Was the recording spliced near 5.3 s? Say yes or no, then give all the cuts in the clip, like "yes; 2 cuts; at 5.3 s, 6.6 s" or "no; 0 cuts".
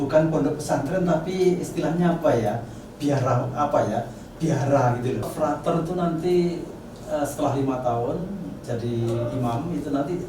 yes; 1 cut; at 5.3 s